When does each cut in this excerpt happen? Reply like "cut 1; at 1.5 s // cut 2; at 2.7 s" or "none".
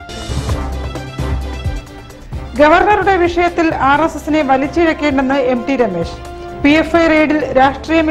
cut 1; at 1.9 s